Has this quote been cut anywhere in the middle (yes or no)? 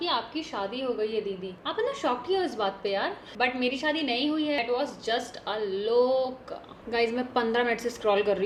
no